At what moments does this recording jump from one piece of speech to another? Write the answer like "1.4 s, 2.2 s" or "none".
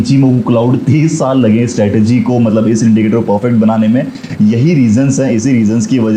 none

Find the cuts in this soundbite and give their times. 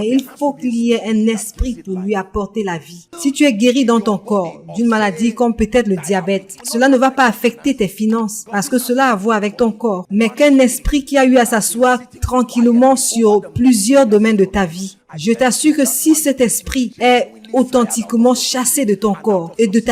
3.0 s, 6.6 s, 8.4 s, 10.0 s

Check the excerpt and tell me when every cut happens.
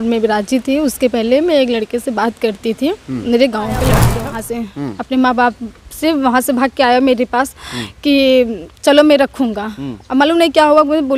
4.1 s

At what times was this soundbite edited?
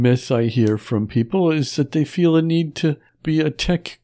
3.1 s

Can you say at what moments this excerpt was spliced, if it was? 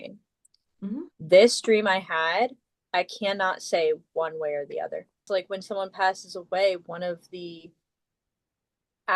5.2 s

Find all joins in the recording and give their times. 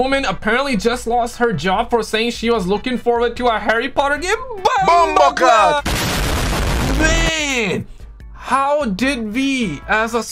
5.8 s

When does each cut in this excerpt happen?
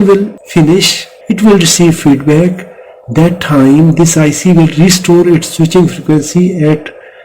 0.9 s

